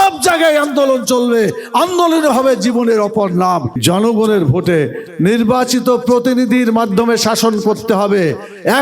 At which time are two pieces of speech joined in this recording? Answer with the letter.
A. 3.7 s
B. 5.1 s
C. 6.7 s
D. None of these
A